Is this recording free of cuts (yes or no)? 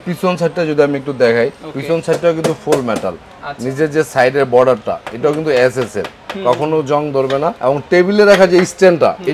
yes